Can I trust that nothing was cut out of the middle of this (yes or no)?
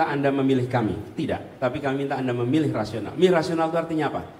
yes